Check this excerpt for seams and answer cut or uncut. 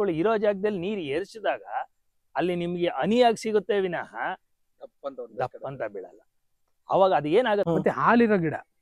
cut